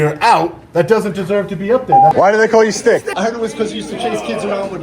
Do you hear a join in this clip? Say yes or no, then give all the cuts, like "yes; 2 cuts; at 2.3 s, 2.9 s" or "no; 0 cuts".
yes; 2 cuts; at 2.1 s, 3.1 s